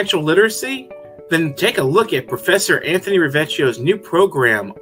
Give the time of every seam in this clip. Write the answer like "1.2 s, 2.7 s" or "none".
none